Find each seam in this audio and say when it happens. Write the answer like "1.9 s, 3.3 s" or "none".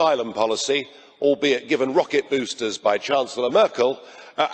none